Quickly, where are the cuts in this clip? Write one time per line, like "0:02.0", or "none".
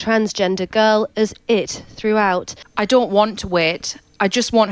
0:02.6